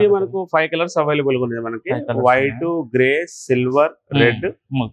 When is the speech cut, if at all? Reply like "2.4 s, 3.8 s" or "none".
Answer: none